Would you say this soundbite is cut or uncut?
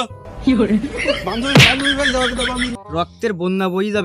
cut